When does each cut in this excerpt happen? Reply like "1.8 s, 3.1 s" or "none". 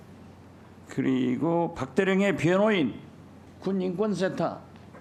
none

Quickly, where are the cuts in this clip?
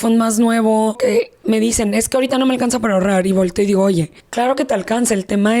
1.0 s, 4.2 s

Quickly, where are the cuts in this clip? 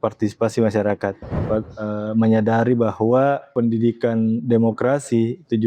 1.3 s

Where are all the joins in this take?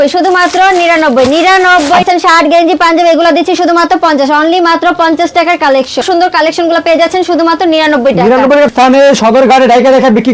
2.0 s, 6.0 s, 8.7 s

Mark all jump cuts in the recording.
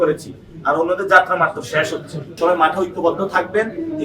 2.2 s

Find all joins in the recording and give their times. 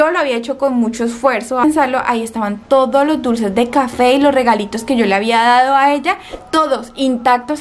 1.6 s

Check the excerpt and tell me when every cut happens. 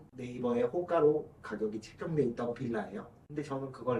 none

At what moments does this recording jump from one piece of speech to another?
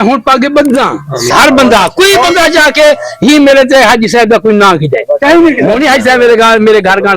1.3 s

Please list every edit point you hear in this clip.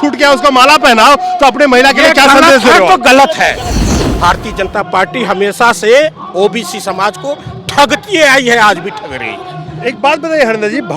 3.8 s

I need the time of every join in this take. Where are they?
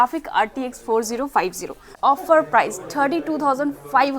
1.9 s

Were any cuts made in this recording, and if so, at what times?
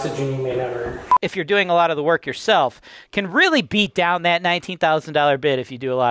1.1 s

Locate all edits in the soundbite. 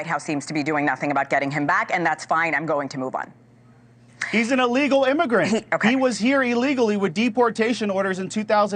none

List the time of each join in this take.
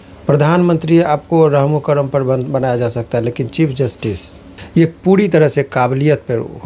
4.5 s

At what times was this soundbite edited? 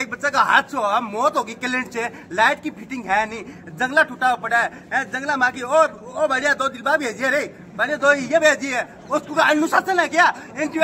none

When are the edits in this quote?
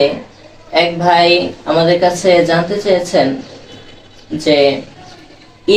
none

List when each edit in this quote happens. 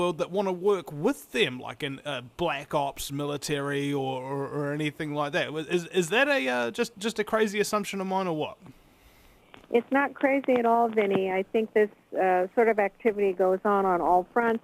10.6 s

